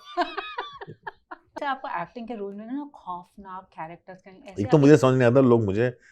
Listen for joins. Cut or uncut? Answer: cut